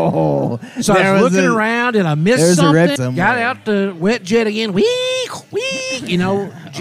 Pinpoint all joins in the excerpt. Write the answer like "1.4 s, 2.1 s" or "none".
2.9 s